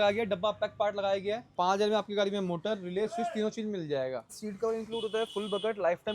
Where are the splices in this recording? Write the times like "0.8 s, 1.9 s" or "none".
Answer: 1.5 s, 4.3 s